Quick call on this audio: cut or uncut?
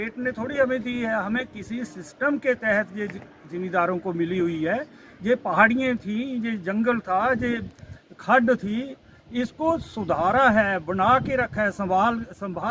uncut